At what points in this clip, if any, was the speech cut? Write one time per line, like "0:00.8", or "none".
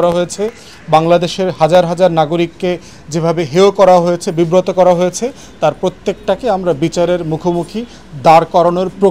none